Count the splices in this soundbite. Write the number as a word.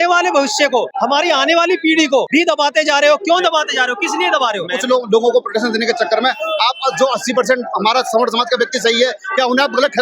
three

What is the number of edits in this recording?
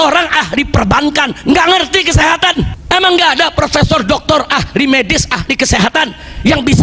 one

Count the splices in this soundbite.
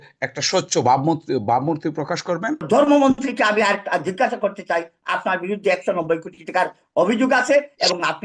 one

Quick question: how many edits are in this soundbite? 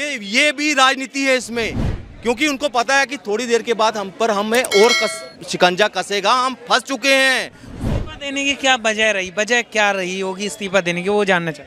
zero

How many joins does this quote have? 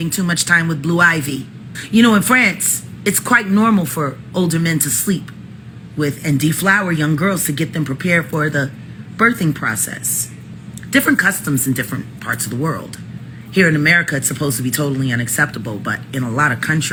zero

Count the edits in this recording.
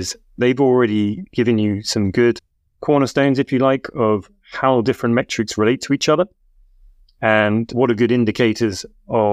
zero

